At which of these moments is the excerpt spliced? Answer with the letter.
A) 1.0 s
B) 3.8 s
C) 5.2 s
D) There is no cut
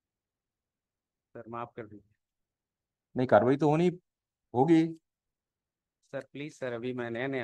D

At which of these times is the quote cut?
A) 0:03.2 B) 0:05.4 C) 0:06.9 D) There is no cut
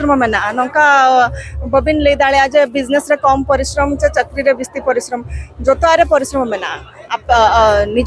D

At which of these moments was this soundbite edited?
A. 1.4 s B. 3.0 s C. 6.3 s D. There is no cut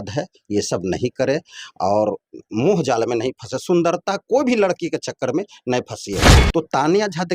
C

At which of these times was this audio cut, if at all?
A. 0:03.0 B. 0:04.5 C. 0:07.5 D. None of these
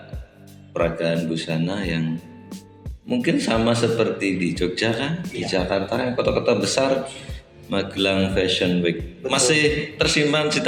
D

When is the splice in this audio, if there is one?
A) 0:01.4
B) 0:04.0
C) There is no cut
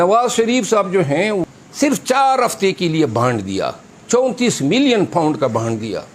A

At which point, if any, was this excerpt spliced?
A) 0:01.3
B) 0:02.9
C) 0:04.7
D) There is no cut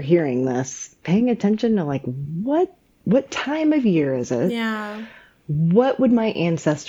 B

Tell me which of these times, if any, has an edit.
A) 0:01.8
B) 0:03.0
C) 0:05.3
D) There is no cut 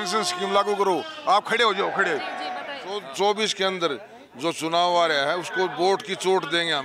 B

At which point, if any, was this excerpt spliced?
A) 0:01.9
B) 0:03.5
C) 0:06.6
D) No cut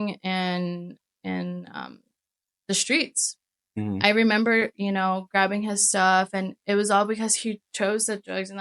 D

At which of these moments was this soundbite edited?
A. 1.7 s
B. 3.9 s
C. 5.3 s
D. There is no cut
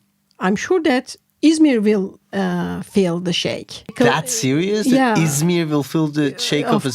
B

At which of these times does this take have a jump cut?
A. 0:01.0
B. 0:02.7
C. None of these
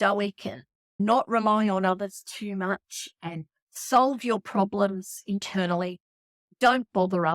A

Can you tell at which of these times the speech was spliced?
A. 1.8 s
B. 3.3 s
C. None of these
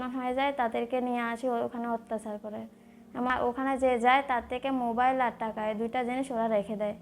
B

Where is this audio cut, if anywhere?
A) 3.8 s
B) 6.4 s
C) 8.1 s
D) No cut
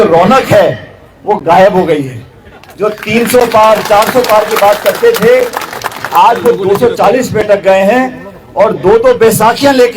D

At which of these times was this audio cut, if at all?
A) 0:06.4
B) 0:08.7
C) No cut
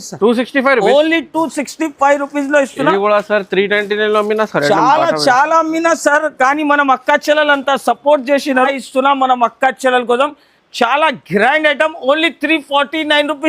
B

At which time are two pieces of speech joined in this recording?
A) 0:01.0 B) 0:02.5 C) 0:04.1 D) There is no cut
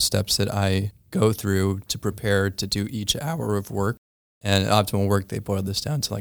C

